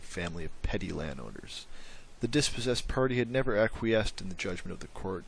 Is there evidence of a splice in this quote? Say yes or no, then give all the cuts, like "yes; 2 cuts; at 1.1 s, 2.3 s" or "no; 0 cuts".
yes; 1 cut; at 3.3 s